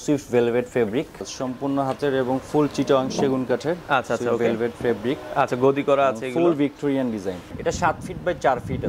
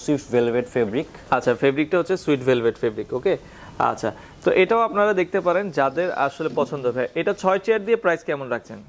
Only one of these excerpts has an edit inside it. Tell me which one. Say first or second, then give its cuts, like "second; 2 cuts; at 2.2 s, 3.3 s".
first; 2 cuts; at 1.2 s, 7.5 s